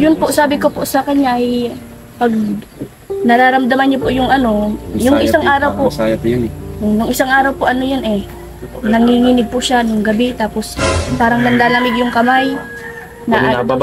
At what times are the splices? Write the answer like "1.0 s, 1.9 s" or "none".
none

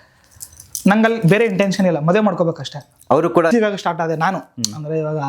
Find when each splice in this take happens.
3.5 s

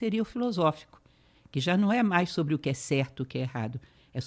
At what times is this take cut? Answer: none

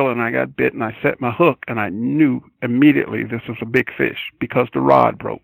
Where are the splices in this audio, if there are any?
none

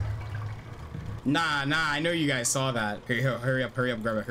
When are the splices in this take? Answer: 1.2 s, 3.0 s

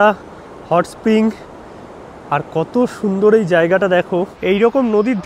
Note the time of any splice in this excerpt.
4.4 s

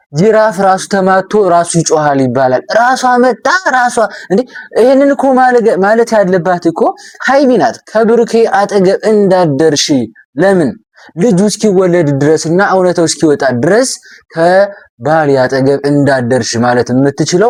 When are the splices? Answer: none

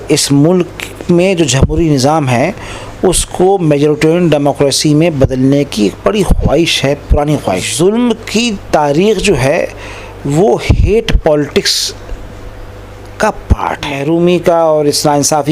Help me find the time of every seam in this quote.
7.7 s, 14.0 s

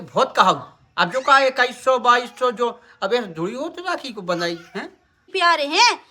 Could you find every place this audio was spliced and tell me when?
5.2 s

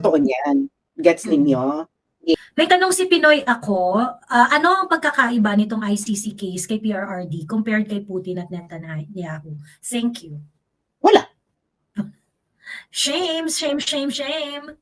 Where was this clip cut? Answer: 2.3 s

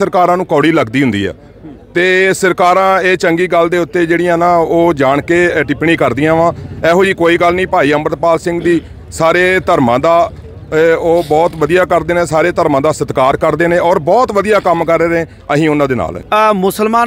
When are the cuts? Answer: 16.2 s

